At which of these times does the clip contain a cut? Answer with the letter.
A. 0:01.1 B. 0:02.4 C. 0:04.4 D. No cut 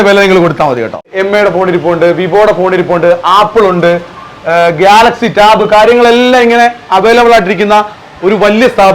A